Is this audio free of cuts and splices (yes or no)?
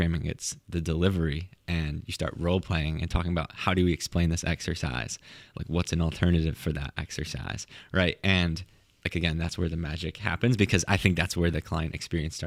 yes